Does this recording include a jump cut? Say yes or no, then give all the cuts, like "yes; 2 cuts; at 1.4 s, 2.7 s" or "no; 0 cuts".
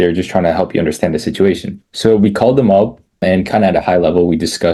no; 0 cuts